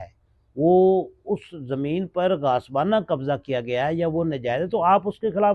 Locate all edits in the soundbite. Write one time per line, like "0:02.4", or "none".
none

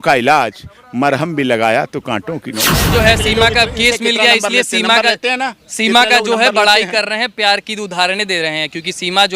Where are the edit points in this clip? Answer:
0:02.9

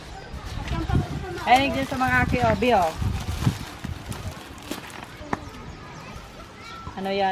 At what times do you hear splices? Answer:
none

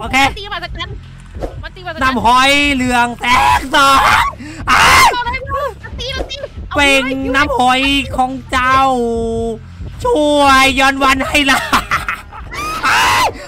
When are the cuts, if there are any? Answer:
none

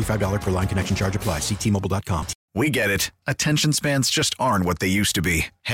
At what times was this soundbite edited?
0:02.3

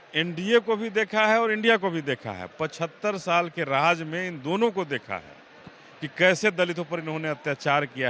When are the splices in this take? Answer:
none

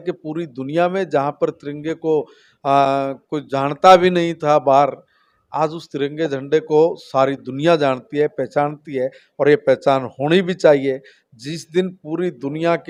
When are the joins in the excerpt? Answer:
none

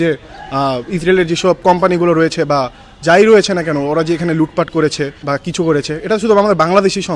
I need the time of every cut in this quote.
0:05.2

